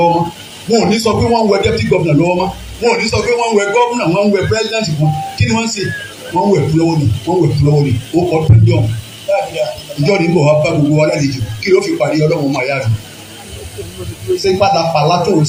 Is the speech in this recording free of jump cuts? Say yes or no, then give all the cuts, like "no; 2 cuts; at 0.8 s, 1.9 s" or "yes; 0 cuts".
yes; 0 cuts